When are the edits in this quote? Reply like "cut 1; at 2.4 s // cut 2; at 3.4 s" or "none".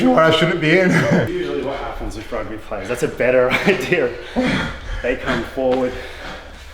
cut 1; at 1.3 s

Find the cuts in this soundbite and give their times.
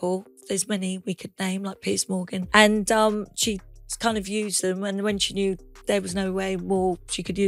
cut 1; at 2.5 s

